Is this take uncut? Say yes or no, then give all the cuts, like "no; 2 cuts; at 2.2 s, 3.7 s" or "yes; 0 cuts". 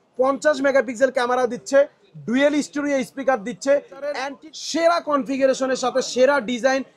no; 1 cut; at 4.3 s